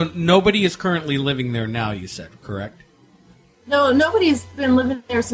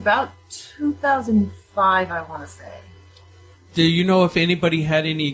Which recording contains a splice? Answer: first; 1 cut; at 1.5 s

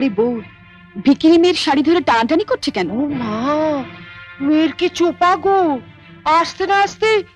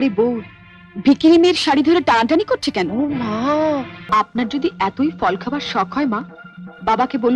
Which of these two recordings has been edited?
second; 1 cut; at 4.1 s

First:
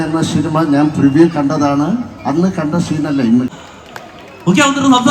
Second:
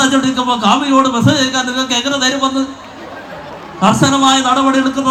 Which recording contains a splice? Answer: first; 1 cut; at 3.5 s

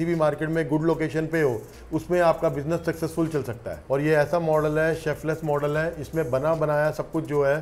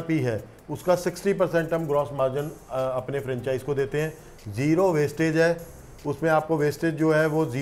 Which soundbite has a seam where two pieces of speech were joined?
first; 1 cut; at 3.7 s

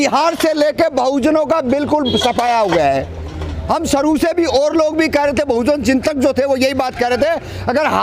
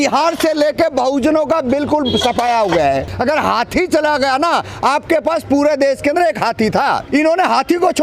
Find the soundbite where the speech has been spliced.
second; 2 cuts; at 3.1 s, 7.0 s

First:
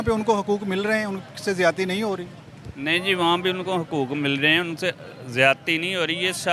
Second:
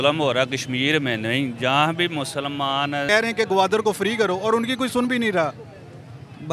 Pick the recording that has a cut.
second; 1 cut; at 3.1 s

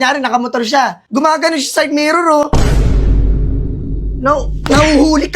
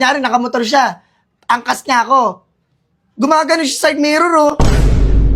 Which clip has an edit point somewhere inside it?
first; 1 cut; at 1.0 s

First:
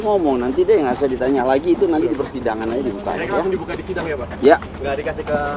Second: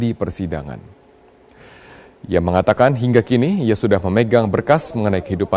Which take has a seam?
first; 1 cut; at 4.1 s

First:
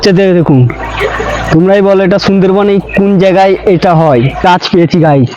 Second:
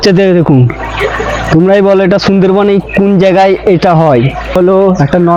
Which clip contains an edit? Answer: first; 1 cut; at 4.4 s

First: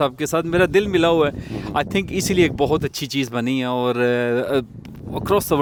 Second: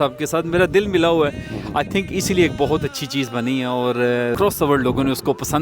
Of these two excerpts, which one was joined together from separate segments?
second; 1 cut; at 4.3 s

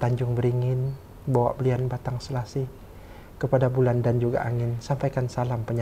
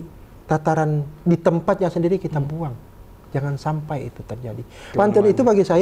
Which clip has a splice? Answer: second; 1 cut; at 4.9 s

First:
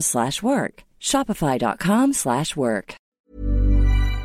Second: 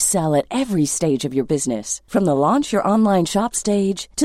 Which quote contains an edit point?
first; 1 cut; at 3.2 s

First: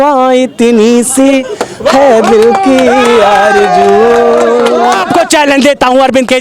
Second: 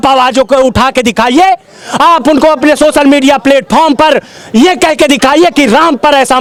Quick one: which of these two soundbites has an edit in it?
first; 1 cut; at 5.0 s

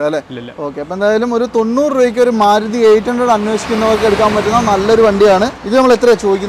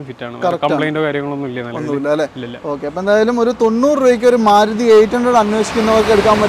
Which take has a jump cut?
first; 1 cut; at 5.6 s

